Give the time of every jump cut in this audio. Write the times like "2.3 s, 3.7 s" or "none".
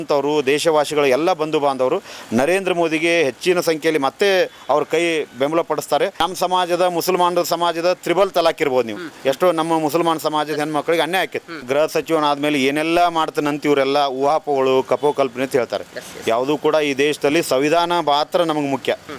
6.1 s, 11.6 s